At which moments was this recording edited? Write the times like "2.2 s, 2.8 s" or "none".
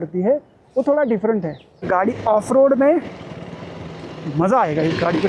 1.8 s